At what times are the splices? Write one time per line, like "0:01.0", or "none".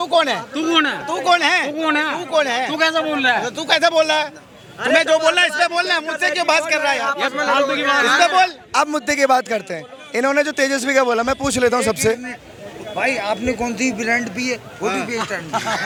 none